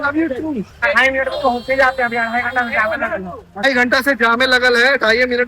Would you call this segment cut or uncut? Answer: cut